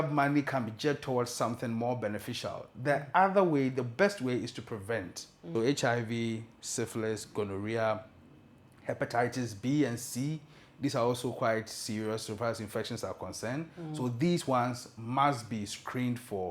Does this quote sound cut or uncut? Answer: cut